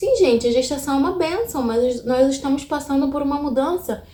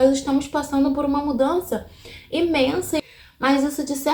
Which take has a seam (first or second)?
second